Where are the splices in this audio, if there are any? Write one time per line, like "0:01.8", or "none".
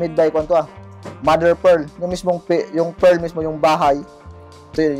none